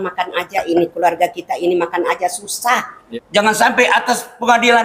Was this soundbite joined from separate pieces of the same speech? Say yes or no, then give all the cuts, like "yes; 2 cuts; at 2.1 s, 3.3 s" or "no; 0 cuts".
yes; 1 cut; at 3.0 s